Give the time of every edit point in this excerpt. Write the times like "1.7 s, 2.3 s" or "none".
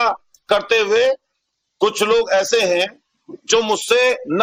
none